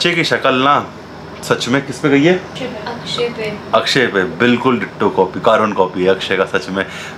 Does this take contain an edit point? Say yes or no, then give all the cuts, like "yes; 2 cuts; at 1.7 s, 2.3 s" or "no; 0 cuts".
no; 0 cuts